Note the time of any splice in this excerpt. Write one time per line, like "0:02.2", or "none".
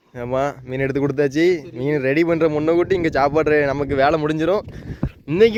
none